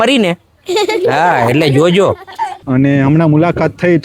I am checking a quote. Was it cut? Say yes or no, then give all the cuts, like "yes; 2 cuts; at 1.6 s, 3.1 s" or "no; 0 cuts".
yes; 1 cut; at 2.6 s